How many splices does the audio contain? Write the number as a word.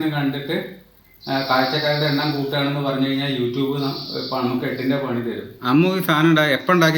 one